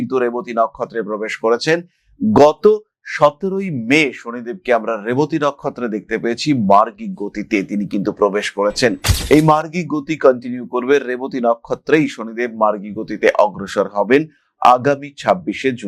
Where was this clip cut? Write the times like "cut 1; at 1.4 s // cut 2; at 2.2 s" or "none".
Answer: none